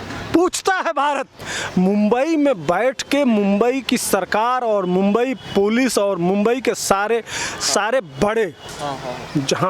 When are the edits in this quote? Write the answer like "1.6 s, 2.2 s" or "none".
1.4 s

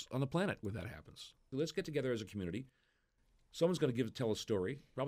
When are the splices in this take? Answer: 1.5 s

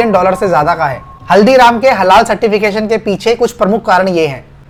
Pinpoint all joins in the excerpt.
none

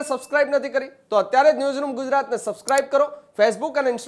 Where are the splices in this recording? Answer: none

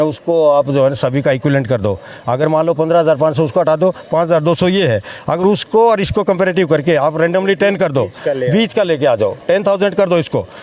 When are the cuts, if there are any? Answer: none

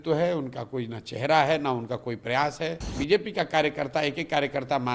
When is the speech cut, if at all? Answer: 2.9 s

